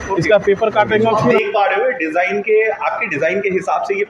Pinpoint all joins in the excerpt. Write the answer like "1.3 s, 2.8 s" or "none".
1.3 s